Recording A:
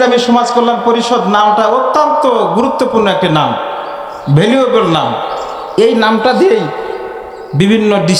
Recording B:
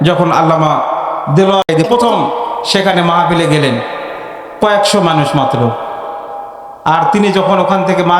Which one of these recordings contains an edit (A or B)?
B